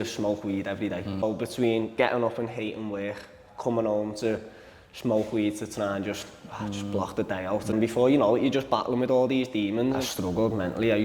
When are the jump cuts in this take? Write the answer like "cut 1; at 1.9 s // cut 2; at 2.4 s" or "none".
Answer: cut 1; at 1.2 s // cut 2; at 7.7 s // cut 3; at 10.0 s